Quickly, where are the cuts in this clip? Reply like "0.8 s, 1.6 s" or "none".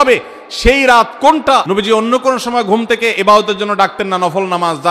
1.7 s